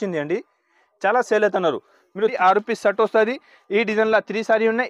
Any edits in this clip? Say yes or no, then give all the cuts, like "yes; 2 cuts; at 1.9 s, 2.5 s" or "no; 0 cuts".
yes; 1 cut; at 2.4 s